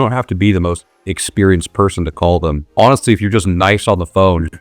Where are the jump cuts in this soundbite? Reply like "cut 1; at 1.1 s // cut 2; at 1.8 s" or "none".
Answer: cut 1; at 2.6 s